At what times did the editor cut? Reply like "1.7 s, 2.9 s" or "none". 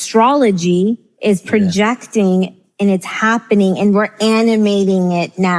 none